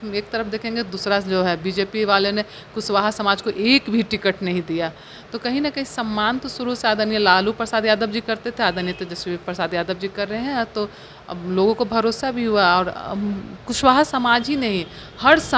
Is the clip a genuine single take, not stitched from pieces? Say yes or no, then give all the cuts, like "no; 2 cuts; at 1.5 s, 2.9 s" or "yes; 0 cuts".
yes; 0 cuts